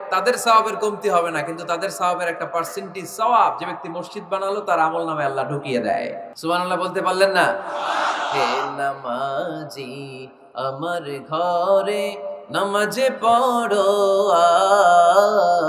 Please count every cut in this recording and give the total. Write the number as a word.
one